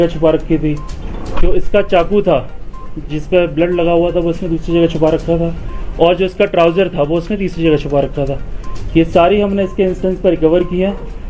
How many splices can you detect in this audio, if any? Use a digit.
0